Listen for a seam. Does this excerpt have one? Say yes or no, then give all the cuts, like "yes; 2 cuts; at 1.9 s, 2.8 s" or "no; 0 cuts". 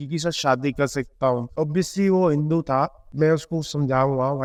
no; 0 cuts